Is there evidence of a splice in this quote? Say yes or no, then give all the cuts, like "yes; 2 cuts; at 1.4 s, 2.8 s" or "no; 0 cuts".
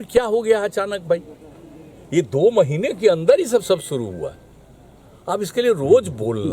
no; 0 cuts